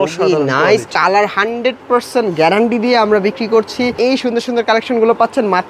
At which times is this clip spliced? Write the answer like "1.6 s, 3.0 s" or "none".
0.9 s, 3.9 s